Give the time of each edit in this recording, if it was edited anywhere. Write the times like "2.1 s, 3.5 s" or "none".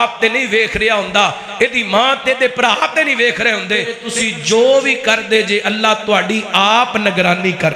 4.0 s

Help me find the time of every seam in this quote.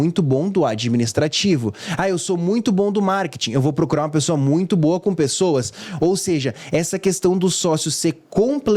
none

